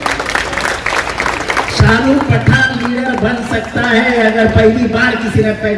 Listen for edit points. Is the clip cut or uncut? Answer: uncut